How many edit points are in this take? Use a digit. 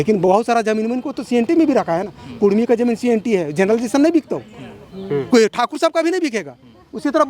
0